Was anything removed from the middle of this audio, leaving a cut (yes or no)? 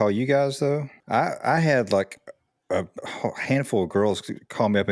yes